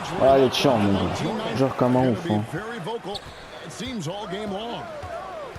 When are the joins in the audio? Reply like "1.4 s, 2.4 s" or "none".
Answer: 1.6 s